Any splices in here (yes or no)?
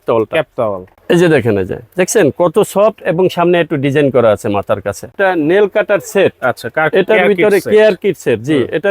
yes